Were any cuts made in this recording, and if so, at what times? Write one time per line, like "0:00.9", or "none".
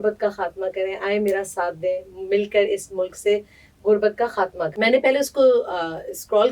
0:04.7